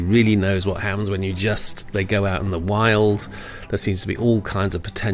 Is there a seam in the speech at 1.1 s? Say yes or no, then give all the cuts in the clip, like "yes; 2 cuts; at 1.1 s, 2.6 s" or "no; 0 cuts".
no; 0 cuts